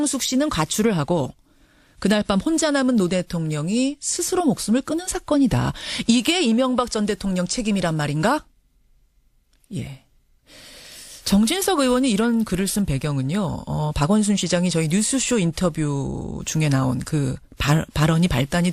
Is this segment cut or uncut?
cut